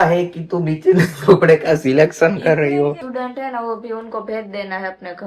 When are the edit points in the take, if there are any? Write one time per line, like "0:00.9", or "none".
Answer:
0:03.0

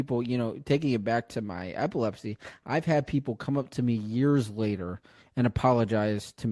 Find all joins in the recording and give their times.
none

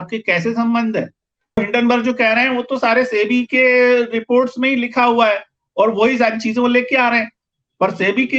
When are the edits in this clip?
0:01.6

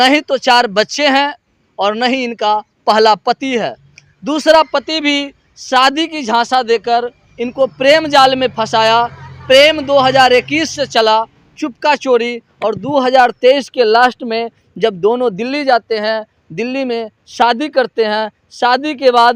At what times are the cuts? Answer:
none

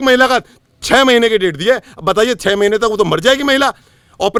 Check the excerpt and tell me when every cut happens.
none

